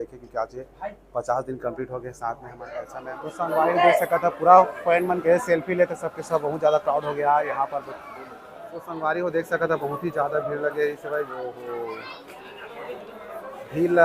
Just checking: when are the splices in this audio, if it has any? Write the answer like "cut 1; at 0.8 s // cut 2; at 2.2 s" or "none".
cut 1; at 2.9 s // cut 2; at 9.0 s